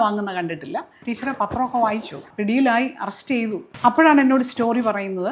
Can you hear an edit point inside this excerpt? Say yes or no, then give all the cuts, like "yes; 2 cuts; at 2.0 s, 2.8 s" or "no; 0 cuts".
yes; 3 cuts; at 1.0 s, 2.3 s, 3.6 s